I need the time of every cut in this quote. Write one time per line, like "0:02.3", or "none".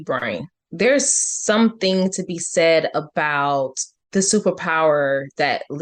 none